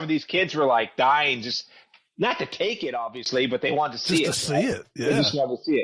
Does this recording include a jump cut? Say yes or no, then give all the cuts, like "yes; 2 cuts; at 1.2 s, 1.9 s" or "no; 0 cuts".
no; 0 cuts